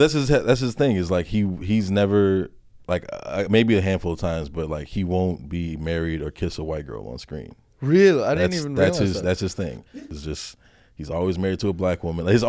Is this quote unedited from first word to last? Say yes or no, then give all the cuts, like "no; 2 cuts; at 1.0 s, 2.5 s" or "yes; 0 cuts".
no; 1 cut; at 9.9 s